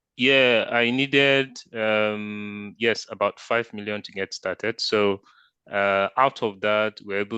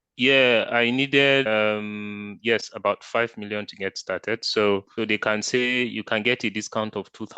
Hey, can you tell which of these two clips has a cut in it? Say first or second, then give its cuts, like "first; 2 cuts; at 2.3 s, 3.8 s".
second; 2 cuts; at 1.5 s, 4.9 s